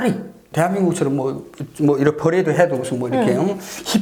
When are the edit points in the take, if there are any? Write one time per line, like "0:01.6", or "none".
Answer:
none

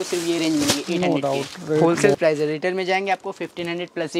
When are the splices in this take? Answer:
0:01.8

